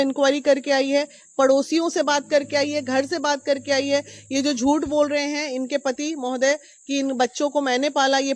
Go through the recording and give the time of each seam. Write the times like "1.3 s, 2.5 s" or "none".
none